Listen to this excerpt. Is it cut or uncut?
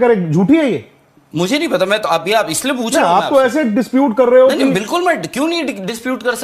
uncut